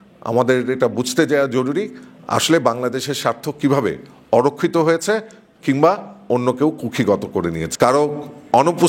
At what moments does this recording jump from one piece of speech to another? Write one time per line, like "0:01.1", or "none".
0:07.6